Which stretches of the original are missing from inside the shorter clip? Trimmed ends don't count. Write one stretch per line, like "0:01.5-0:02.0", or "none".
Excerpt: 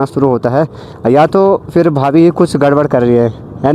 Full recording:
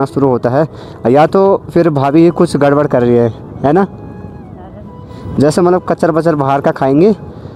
none